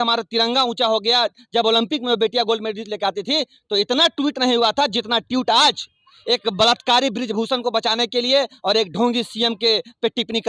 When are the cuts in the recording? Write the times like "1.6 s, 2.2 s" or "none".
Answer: none

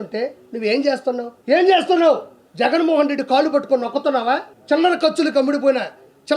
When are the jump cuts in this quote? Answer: 1.3 s, 4.5 s

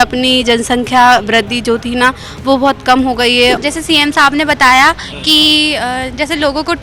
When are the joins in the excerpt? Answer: 3.6 s

